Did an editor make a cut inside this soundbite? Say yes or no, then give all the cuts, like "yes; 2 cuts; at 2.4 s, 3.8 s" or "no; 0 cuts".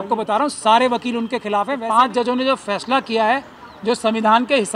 yes; 1 cut; at 1.8 s